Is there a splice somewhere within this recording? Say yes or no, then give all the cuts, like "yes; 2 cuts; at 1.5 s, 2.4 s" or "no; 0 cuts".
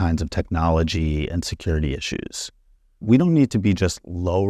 yes; 1 cut; at 3.0 s